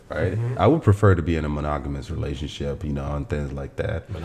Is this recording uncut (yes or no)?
yes